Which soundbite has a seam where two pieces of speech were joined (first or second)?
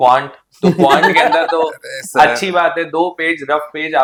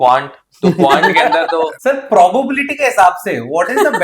second